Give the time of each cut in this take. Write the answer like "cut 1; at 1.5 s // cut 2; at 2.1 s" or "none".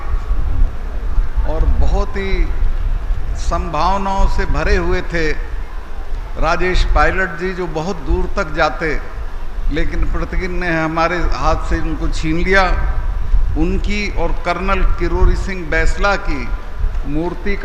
none